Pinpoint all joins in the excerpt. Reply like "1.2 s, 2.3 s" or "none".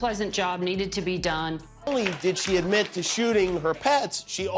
1.8 s